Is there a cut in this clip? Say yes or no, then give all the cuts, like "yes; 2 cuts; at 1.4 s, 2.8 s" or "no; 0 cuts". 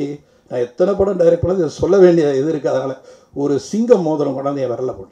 no; 0 cuts